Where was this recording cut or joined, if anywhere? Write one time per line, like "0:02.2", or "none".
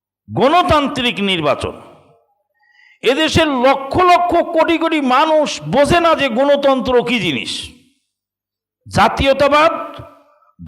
none